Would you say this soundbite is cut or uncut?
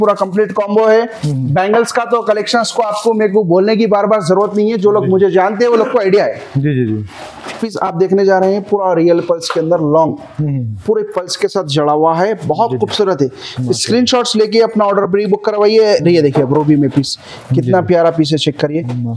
uncut